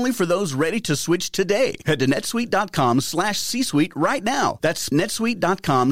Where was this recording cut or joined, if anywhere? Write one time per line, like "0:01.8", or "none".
0:04.9